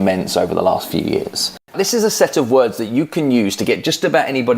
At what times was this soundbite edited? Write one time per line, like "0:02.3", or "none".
0:01.7